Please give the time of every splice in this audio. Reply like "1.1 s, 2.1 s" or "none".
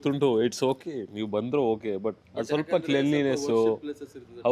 2.3 s

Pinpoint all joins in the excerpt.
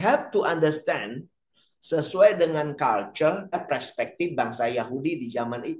3.6 s

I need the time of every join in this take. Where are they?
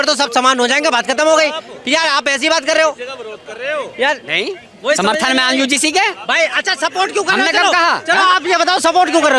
none

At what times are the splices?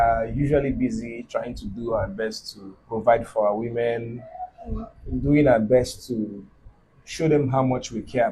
none

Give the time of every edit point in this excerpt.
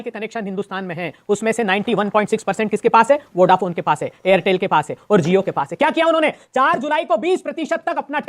none

